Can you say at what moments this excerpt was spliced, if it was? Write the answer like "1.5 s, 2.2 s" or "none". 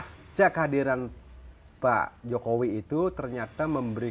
none